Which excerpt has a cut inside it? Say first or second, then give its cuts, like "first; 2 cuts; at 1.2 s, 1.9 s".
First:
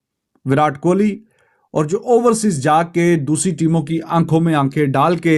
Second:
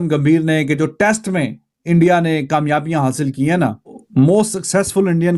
second; 1 cut; at 4.0 s